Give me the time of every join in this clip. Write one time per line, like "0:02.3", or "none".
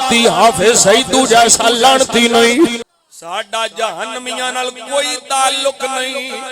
0:02.8